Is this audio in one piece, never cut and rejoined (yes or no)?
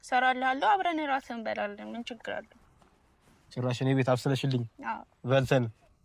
yes